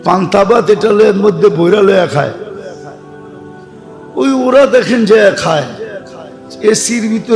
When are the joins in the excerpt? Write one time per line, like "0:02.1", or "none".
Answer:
none